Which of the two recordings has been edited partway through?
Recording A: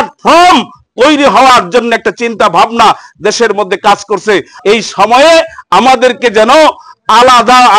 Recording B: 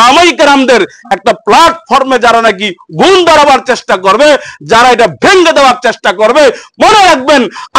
A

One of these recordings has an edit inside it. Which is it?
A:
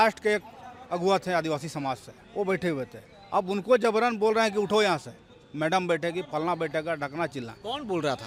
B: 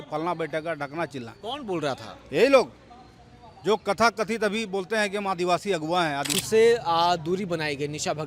B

